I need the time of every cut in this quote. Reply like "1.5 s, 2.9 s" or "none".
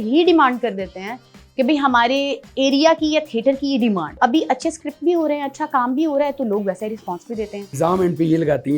4.2 s, 7.7 s